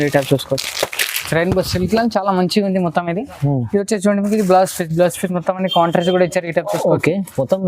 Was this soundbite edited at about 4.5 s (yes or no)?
no